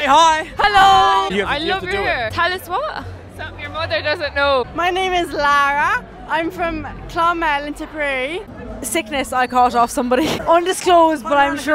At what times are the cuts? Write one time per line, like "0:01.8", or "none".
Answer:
0:01.3
0:04.7
0:08.5